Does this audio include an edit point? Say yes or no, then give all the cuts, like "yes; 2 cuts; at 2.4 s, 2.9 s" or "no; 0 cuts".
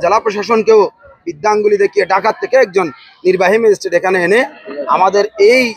no; 0 cuts